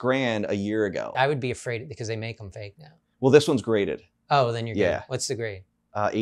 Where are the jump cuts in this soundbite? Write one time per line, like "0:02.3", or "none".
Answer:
0:01.1